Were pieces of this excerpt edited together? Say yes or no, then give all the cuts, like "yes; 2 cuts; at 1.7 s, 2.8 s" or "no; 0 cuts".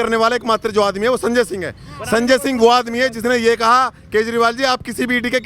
no; 0 cuts